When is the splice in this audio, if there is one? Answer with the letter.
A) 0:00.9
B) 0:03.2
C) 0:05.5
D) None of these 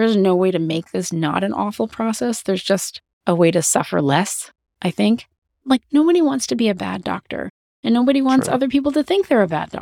C